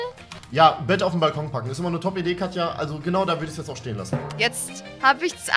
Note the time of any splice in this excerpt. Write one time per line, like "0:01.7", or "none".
0:04.3